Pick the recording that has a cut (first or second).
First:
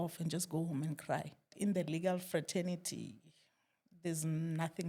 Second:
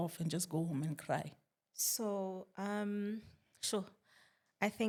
first